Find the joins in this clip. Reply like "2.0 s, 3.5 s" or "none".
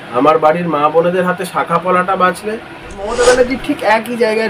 3.0 s